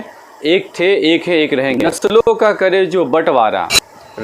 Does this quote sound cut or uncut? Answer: cut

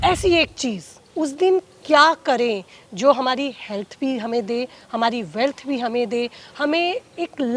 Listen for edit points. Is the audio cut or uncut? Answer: uncut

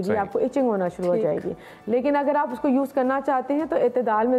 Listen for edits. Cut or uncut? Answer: uncut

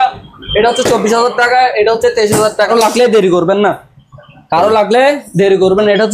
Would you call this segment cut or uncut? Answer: cut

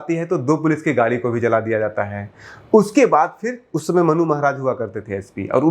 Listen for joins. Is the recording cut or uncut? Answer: uncut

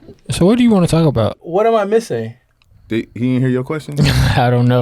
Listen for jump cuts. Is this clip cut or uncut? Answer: cut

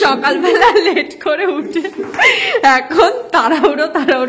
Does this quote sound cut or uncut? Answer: uncut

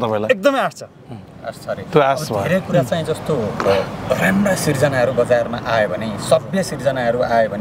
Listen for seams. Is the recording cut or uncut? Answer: uncut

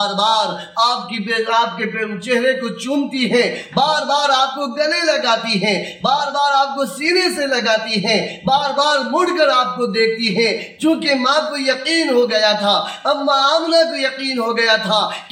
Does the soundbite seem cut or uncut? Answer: uncut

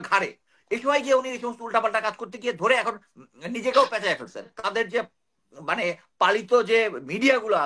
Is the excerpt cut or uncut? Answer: cut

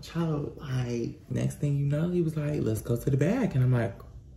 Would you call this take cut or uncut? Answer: cut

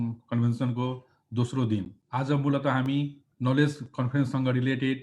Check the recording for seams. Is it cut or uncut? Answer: cut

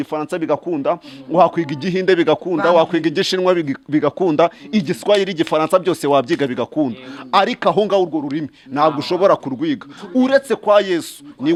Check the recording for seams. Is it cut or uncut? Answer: uncut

